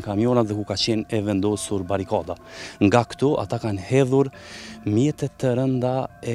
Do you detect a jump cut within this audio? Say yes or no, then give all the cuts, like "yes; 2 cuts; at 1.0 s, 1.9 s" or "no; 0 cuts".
no; 0 cuts